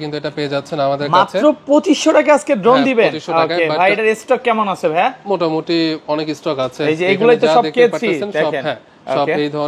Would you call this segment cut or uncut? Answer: uncut